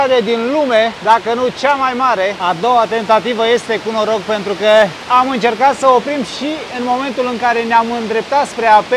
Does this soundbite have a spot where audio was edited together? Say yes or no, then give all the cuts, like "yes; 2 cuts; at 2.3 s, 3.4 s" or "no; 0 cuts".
no; 0 cuts